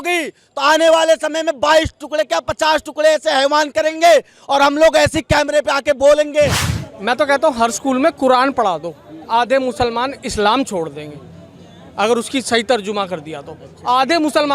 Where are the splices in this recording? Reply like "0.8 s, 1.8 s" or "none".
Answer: 6.6 s